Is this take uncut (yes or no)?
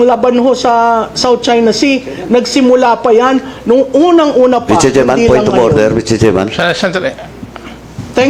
yes